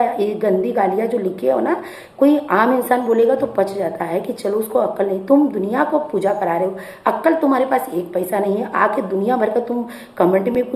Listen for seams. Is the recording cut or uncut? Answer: uncut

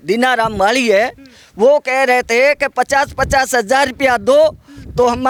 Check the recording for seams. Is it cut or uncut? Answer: uncut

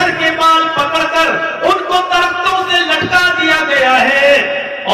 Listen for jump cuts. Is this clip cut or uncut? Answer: uncut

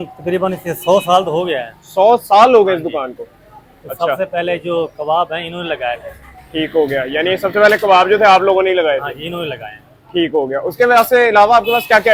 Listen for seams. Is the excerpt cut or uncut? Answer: uncut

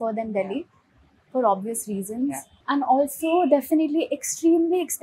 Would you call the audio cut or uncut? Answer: cut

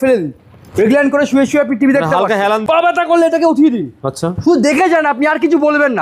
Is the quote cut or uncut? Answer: cut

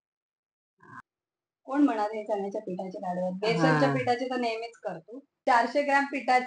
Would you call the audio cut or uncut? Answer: cut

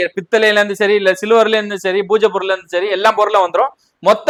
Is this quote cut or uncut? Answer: uncut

